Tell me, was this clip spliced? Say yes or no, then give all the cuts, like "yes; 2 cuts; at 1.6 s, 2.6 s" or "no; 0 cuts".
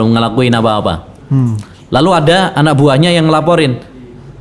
no; 0 cuts